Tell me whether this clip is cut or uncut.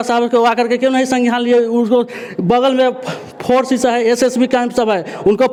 uncut